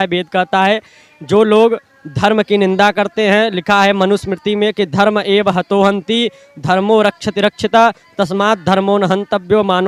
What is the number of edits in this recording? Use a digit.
0